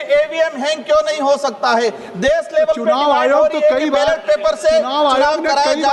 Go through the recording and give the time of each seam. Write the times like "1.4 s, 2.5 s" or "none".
none